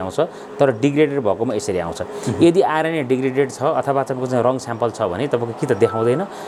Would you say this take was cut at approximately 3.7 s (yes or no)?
no